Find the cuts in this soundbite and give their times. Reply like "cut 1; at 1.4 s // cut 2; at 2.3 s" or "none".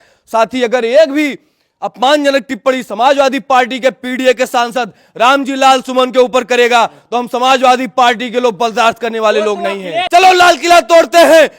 cut 1; at 10.0 s